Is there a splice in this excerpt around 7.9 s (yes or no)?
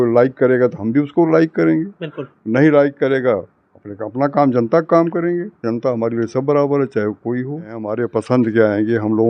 yes